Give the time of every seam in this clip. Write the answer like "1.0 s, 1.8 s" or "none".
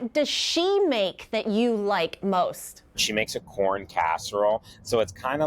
2.6 s